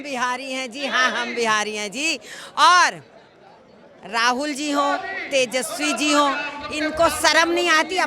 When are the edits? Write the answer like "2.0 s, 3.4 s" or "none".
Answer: none